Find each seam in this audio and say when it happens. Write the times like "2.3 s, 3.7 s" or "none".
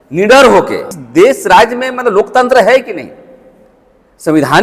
1.0 s